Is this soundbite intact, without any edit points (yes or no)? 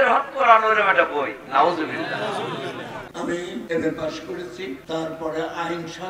no